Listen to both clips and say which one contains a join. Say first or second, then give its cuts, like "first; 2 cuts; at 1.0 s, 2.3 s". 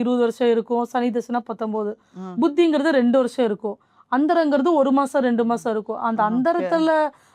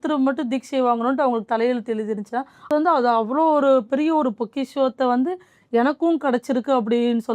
second; 1 cut; at 2.7 s